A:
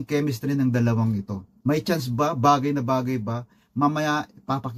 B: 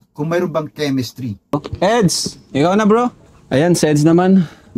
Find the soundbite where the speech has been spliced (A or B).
B